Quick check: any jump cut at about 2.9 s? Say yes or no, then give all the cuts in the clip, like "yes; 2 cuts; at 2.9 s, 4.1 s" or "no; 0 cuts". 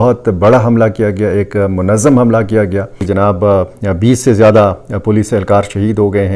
yes; 1 cut; at 2.9 s